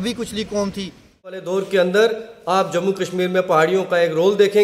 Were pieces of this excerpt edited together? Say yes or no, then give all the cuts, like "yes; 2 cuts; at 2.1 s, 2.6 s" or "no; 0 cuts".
yes; 1 cut; at 1.3 s